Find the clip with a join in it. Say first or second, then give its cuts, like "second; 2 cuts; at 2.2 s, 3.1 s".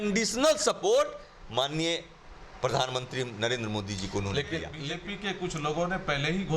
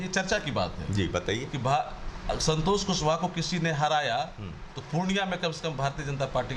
first; 1 cut; at 4.7 s